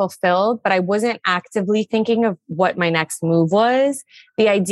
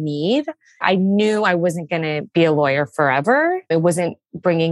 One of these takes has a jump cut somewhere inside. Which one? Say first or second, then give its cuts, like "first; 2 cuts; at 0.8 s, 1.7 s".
second; 3 cuts; at 0.8 s, 2.2 s, 3.6 s